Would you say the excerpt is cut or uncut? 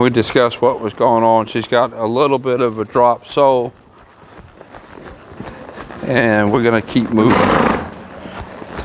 uncut